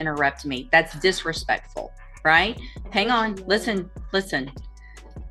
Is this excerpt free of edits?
yes; 0 cuts

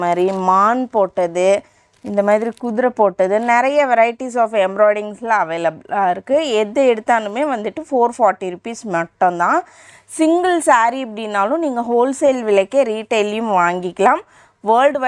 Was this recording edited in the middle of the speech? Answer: no; 0 cuts

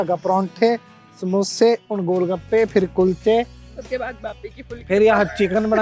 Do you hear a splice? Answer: no; 0 cuts

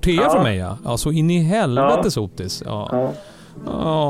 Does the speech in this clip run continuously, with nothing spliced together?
yes; 0 cuts

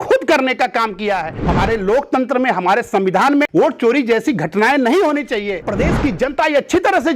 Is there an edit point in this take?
yes; 3 cuts; at 1.4 s, 3.5 s, 5.7 s

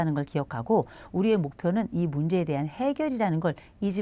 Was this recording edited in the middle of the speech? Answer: no; 0 cuts

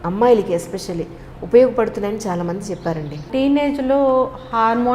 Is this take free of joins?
no; 1 cut; at 3.3 s

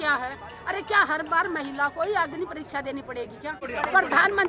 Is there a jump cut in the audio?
yes; 1 cut; at 3.3 s

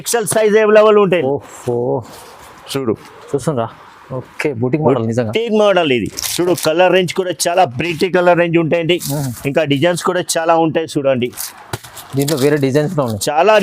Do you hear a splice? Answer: yes; 1 cut; at 1.2 s

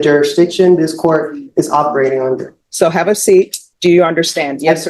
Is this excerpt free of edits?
no; 2 cuts; at 2.6 s, 3.6 s

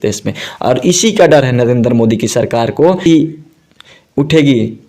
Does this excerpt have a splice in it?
yes; 1 cut; at 3.0 s

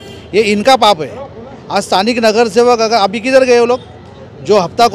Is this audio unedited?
yes; 0 cuts

